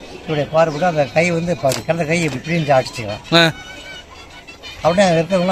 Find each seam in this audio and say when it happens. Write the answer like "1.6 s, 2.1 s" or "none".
none